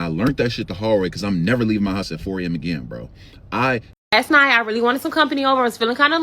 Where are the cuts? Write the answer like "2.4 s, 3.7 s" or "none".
3.9 s